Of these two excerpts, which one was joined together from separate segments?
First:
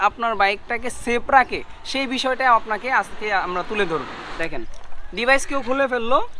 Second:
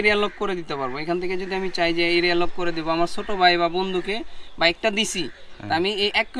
first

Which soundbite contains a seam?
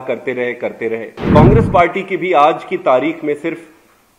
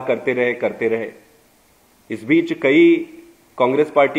first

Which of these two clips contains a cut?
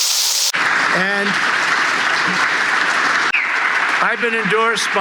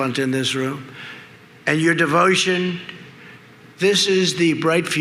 first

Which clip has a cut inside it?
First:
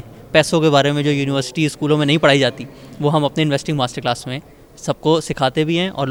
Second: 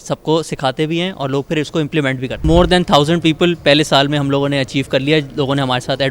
second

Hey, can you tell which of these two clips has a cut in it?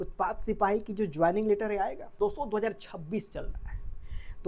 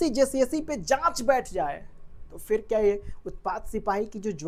first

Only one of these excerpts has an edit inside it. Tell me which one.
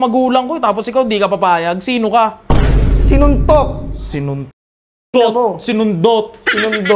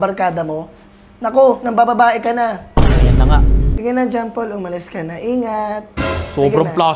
second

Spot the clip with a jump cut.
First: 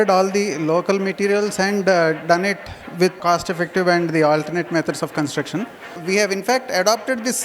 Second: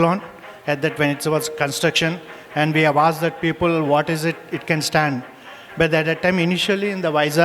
first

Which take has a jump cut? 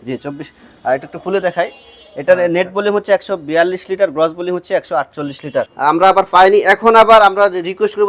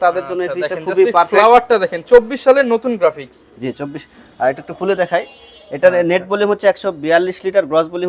first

